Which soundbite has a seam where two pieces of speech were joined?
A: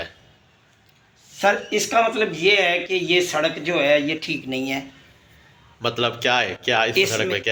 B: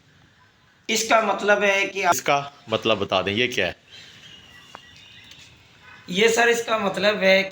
B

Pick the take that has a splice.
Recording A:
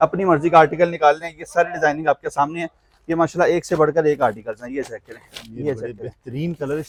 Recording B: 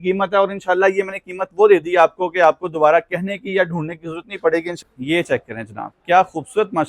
B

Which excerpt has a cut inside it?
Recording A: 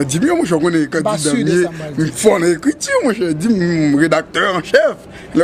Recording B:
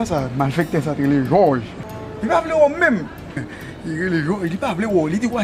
A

